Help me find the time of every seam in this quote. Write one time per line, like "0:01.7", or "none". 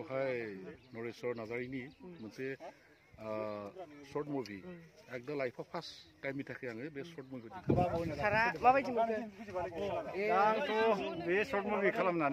0:07.6

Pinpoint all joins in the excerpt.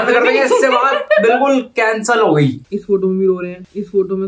0:02.7

